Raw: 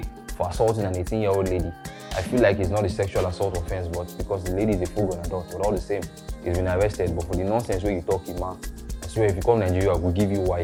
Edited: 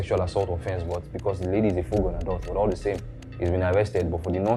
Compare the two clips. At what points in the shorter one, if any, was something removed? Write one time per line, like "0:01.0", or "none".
none